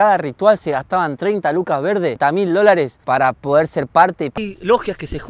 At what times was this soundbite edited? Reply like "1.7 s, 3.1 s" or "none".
2.2 s, 3.0 s, 4.4 s